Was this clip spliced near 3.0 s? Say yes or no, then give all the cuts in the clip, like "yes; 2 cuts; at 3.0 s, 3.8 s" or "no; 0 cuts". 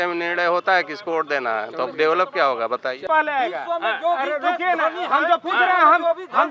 yes; 1 cut; at 3.0 s